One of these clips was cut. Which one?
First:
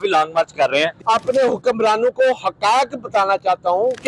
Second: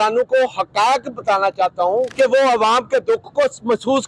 first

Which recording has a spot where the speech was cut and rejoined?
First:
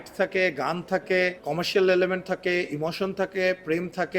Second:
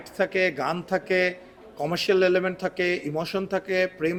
first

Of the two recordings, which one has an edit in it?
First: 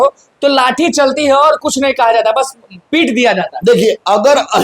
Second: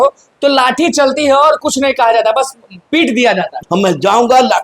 second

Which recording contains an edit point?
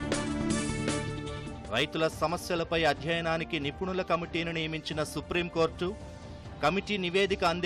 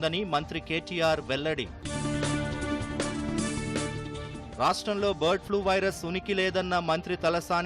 first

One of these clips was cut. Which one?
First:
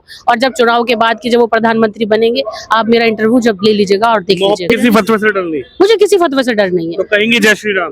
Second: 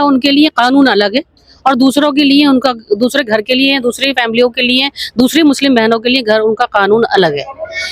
first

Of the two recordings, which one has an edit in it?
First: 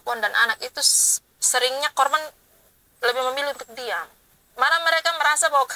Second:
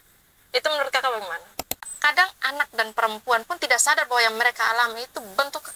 second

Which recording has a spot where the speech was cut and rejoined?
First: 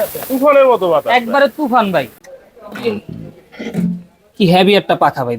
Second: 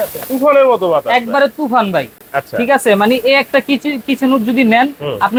first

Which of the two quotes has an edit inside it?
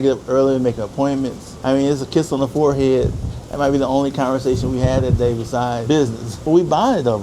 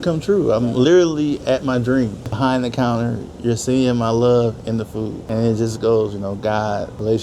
first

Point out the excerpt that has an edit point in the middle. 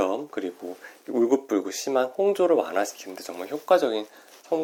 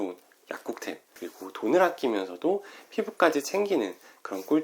second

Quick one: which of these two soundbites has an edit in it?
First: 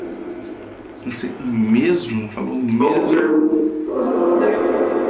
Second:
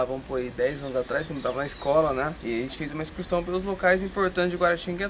second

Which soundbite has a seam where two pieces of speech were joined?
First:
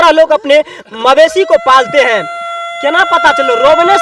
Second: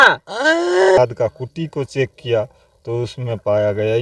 second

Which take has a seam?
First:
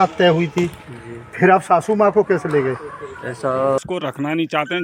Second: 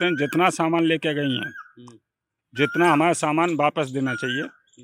first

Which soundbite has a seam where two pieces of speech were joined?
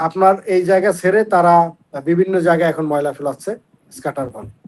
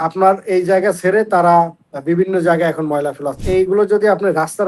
second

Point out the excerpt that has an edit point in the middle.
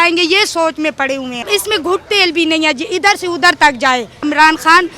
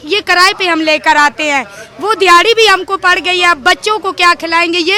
first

